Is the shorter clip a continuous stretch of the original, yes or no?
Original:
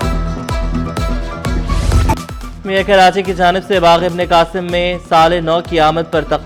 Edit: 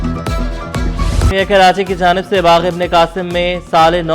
no